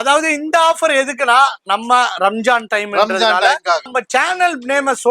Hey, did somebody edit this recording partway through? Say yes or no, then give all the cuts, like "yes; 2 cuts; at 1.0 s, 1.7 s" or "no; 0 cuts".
yes; 1 cut; at 3.9 s